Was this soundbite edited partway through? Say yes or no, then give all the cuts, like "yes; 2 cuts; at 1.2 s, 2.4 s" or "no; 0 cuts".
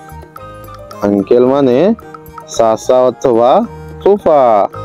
no; 0 cuts